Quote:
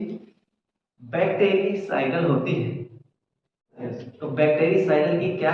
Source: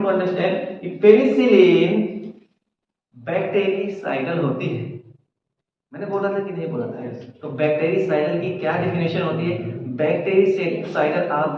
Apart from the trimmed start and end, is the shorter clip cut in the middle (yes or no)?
yes